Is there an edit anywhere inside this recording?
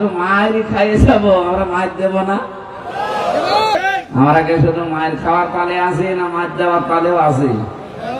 yes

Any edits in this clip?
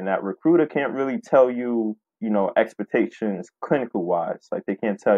yes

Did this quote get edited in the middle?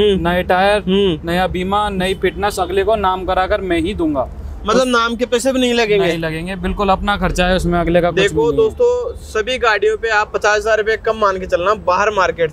no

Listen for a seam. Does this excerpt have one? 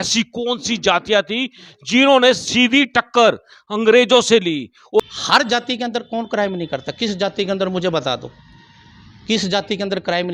yes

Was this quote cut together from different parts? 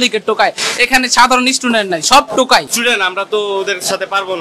yes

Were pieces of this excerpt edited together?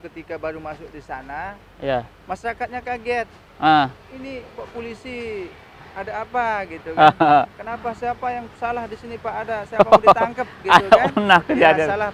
no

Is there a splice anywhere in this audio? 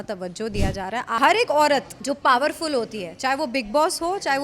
yes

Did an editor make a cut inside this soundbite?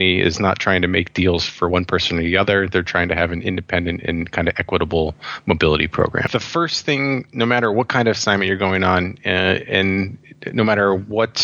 yes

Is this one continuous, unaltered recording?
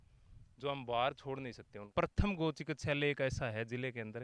no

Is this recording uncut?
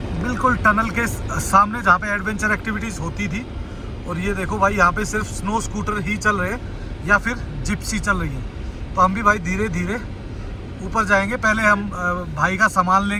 yes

